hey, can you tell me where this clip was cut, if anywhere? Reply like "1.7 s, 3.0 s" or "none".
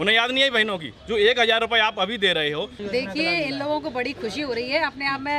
2.8 s